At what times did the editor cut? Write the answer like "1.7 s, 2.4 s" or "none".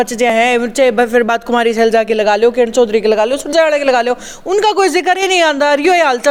none